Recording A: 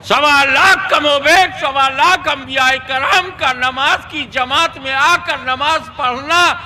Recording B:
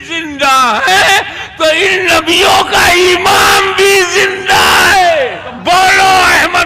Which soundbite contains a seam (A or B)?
B